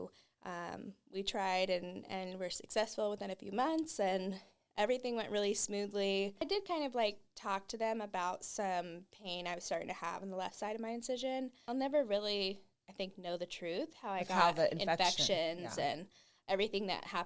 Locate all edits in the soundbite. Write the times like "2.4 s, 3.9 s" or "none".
6.4 s, 11.6 s